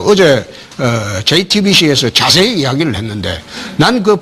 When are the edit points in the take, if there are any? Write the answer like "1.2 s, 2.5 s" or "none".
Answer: none

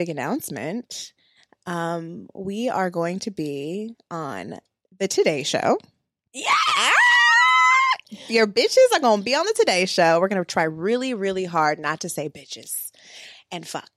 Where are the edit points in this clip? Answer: none

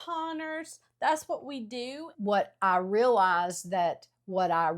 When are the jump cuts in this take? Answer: 2.1 s

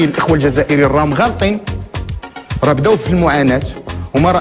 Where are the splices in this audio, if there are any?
none

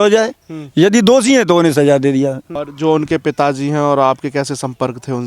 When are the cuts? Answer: 2.6 s

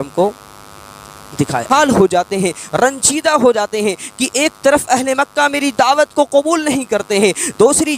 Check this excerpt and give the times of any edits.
1.7 s

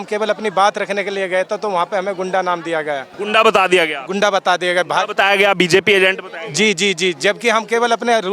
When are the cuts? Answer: 3.1 s

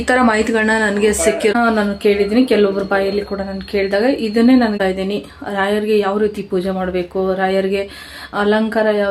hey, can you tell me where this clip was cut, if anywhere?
1.5 s, 4.7 s

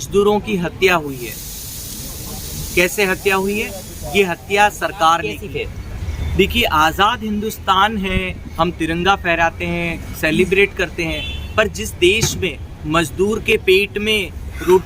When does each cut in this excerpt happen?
5.4 s

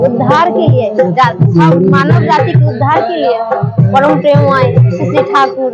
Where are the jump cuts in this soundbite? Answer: none

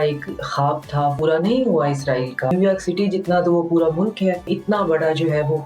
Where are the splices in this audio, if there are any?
1.2 s, 2.5 s, 4.5 s

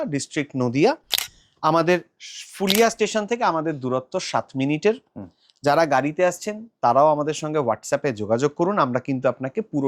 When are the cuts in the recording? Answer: none

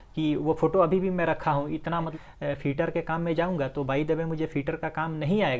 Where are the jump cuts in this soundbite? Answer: 2.1 s

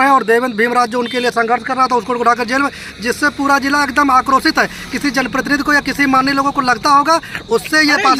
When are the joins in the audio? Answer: none

